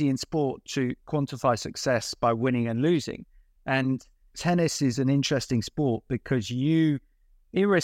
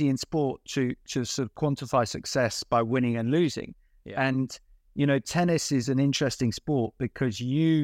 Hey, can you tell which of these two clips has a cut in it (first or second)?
first